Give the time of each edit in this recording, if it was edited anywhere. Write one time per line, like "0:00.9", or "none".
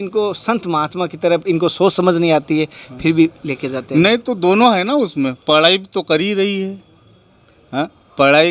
none